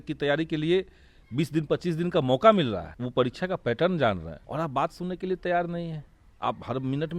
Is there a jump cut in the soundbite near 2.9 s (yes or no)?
yes